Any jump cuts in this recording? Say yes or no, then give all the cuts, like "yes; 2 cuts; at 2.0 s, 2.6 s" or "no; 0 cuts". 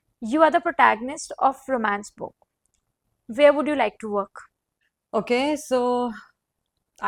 no; 0 cuts